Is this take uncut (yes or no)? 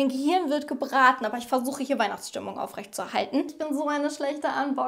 no